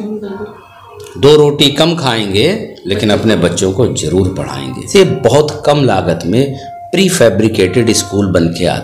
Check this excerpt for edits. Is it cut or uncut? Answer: cut